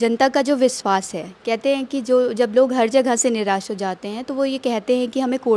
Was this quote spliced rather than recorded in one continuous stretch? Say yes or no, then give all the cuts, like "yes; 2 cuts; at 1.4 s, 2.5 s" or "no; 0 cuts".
no; 0 cuts